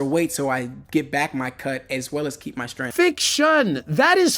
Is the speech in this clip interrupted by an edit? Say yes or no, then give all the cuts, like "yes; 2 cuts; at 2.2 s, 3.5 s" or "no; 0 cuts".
yes; 1 cut; at 2.8 s